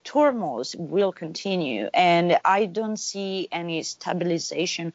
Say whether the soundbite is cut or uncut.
uncut